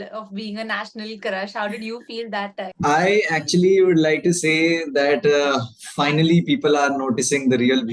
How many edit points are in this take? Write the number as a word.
zero